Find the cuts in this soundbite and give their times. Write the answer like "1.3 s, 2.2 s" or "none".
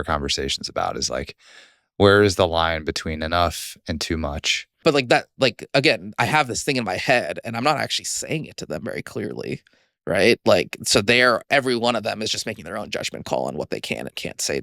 4.6 s